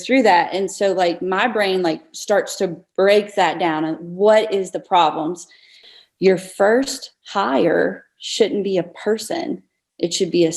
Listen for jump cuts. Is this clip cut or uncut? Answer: cut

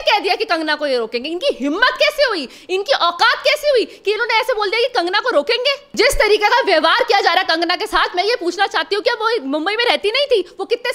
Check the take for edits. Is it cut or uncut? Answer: cut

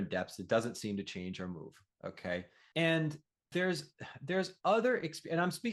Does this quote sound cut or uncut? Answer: cut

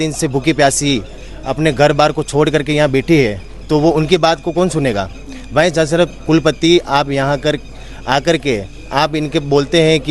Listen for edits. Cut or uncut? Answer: uncut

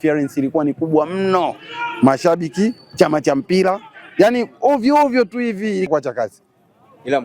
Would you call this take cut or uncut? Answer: cut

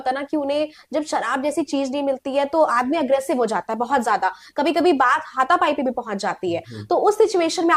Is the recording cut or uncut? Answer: uncut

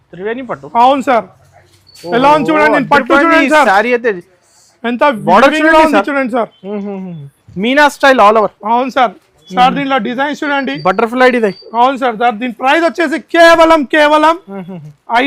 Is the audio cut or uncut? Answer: uncut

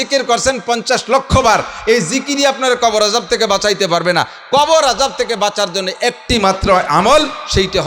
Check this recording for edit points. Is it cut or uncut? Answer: uncut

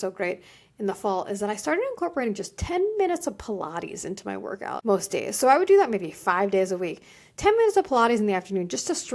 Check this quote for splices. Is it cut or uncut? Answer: cut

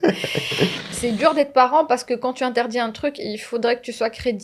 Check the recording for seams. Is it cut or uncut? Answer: cut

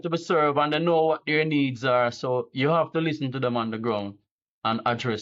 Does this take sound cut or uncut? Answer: uncut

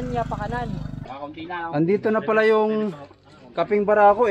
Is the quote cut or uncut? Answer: cut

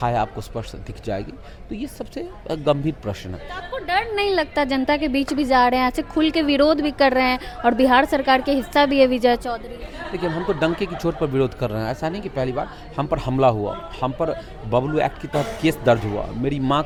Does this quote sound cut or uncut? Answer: uncut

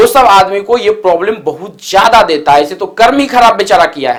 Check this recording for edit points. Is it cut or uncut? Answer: uncut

